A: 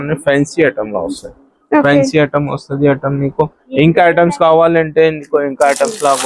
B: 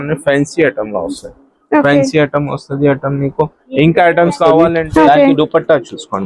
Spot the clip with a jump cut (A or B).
B